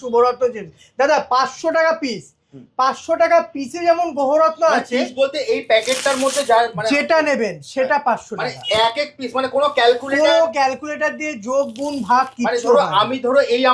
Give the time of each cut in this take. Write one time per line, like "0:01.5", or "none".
none